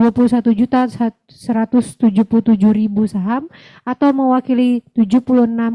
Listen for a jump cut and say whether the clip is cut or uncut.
uncut